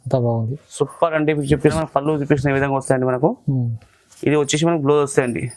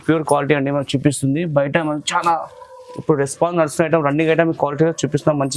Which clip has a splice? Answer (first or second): first